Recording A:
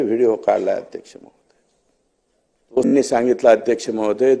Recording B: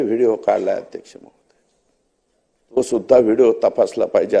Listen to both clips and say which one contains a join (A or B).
A